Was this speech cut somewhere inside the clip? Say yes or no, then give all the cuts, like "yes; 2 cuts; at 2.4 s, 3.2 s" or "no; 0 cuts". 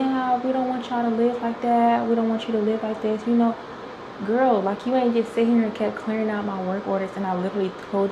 no; 0 cuts